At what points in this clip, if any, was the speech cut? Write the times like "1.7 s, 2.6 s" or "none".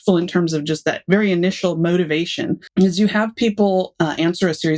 2.6 s